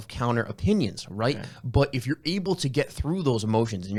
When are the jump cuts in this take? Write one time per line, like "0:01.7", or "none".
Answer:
none